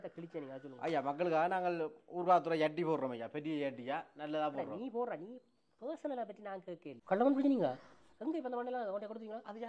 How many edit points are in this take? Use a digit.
1